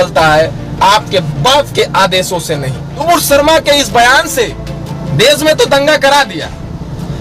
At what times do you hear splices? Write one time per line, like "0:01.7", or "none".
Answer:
0:03.0